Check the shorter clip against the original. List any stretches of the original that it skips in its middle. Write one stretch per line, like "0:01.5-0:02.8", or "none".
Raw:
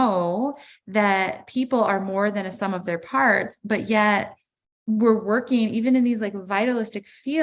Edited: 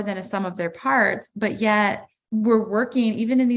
0:04.4-0:04.7